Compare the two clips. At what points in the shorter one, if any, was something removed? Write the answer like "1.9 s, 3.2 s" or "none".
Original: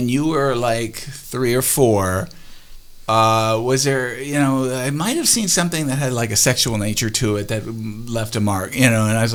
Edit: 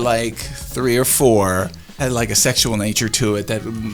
2.0 s